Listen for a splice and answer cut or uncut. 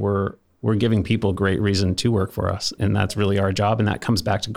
cut